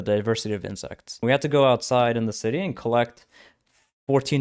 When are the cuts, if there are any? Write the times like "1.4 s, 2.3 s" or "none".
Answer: 1.2 s